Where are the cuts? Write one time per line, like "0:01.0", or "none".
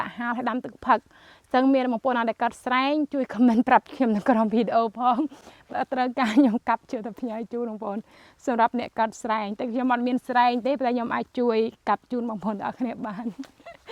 none